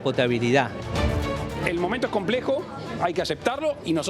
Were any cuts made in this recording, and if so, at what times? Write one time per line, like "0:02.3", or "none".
0:01.0